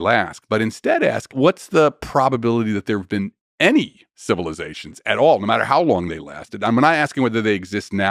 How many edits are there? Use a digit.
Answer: 1